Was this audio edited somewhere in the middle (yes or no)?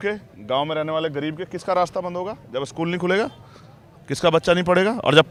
no